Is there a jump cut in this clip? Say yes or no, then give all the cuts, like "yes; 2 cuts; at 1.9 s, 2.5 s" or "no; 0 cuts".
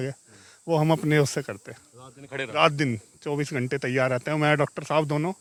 no; 0 cuts